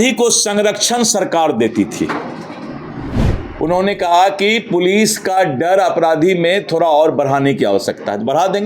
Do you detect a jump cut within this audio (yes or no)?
yes